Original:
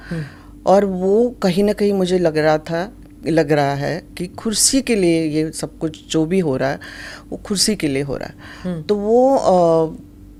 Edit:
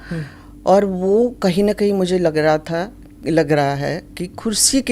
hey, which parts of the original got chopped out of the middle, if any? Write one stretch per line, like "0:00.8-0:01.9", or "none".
none